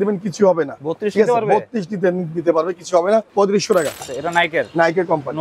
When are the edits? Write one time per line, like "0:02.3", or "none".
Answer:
0:03.3
0:04.1